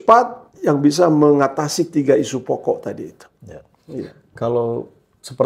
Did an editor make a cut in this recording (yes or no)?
no